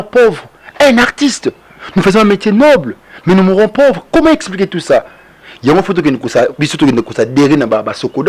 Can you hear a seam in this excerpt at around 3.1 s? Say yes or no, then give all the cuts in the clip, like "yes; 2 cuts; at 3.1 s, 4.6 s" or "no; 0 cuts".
no; 0 cuts